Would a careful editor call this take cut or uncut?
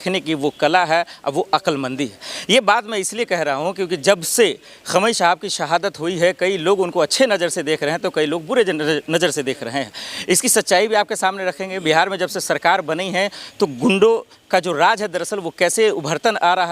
uncut